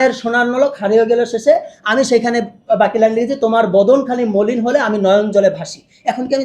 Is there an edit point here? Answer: no; 0 cuts

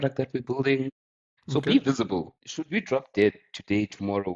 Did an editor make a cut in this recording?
yes; 1 cut; at 2.4 s

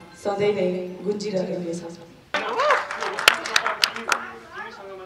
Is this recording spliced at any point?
yes; 1 cut; at 2.4 s

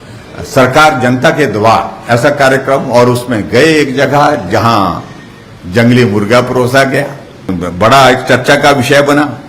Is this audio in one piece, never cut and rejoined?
no; 1 cut; at 7.5 s

